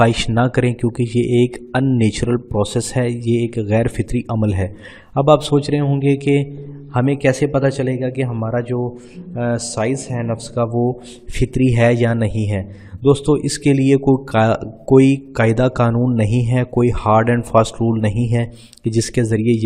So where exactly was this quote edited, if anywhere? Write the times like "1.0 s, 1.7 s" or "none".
17.0 s